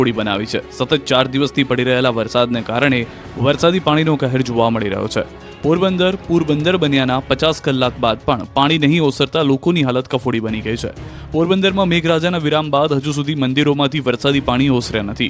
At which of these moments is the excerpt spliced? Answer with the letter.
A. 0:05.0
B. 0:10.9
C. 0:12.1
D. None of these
A